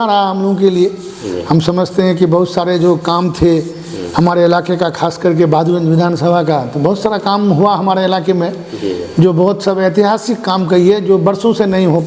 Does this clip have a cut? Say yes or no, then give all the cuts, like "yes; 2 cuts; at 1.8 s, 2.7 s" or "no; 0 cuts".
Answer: no; 0 cuts